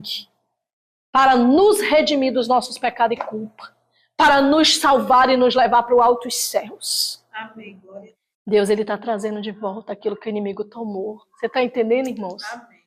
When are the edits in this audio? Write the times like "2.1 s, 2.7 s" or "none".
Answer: 8.2 s

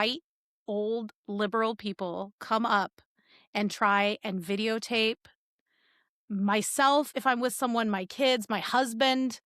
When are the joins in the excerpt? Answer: none

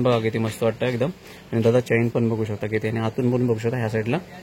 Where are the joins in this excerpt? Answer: none

